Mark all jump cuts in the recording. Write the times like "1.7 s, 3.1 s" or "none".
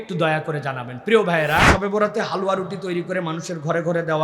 1.7 s